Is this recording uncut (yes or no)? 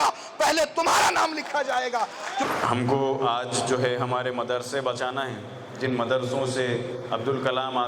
yes